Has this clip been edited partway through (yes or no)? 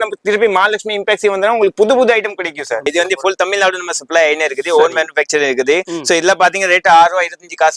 yes